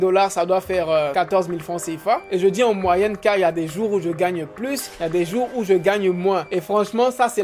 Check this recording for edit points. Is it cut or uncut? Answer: cut